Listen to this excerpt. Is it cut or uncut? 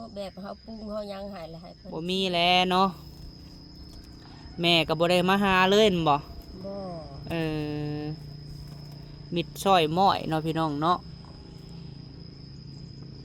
cut